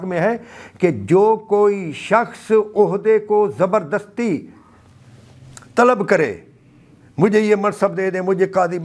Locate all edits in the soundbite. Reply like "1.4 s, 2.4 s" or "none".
none